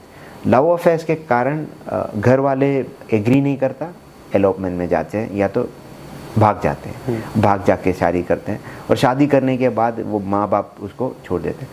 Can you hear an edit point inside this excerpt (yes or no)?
no